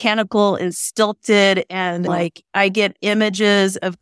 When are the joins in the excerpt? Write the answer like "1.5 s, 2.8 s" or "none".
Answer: 2.1 s